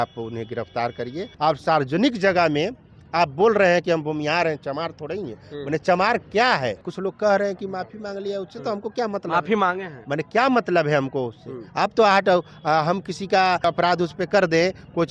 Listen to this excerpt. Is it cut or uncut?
cut